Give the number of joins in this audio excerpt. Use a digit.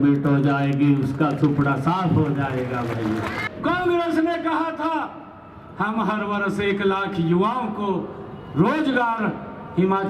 1